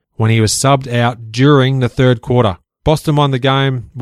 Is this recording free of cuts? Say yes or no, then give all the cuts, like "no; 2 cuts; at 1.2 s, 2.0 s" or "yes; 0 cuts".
no; 1 cut; at 2.7 s